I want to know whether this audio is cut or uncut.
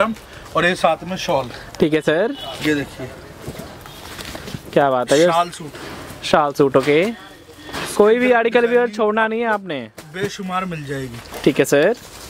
uncut